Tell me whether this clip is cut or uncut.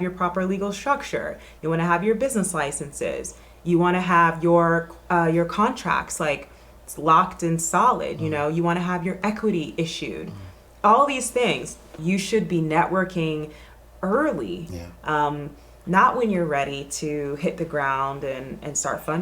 cut